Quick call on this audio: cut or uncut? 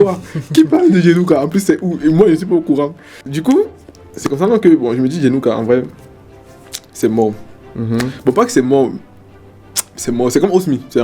cut